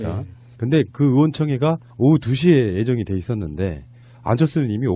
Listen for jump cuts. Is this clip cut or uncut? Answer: uncut